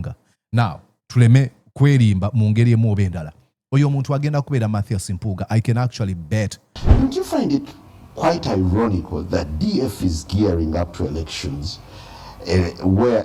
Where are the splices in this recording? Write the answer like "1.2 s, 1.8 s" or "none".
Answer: 6.8 s